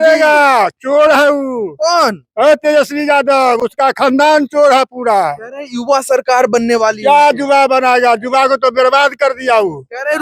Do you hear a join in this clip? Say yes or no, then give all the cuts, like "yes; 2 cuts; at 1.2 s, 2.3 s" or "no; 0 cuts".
no; 0 cuts